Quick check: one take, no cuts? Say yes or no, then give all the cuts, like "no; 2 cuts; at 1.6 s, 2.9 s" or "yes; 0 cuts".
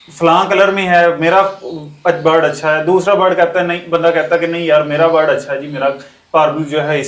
yes; 0 cuts